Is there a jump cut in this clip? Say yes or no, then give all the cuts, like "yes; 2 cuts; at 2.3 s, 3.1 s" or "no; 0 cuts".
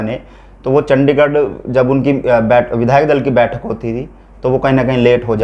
no; 0 cuts